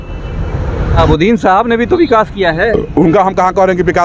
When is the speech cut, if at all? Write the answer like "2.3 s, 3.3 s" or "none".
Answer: 1.0 s